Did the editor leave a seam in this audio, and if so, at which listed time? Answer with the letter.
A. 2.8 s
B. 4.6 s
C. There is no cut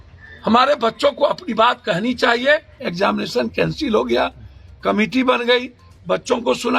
A